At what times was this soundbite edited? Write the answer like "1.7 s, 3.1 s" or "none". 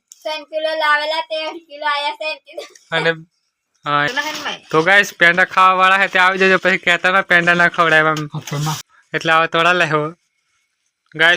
4.1 s, 8.8 s